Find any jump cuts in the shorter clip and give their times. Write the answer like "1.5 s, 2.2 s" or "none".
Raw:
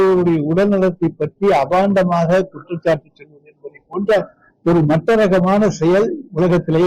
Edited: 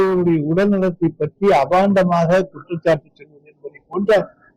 none